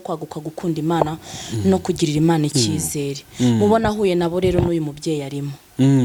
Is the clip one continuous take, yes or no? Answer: yes